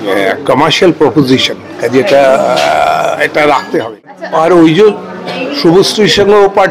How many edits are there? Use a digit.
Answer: 1